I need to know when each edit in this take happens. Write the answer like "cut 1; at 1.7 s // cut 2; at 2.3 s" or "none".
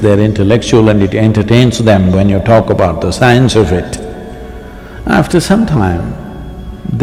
none